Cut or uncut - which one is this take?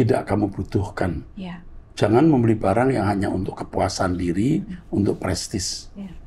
uncut